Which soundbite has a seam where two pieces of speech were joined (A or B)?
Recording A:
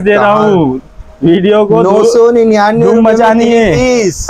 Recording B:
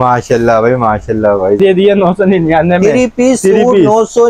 B